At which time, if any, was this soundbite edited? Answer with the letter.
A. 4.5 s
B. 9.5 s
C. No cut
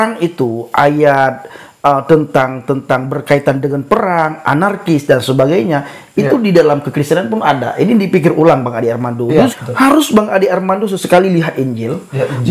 B